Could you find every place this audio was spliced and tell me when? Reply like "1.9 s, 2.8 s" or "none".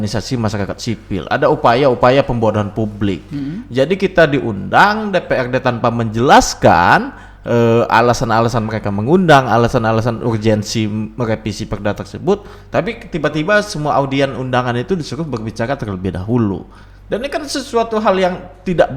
none